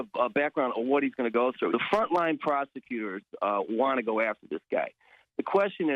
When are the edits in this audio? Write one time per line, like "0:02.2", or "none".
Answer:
0:01.7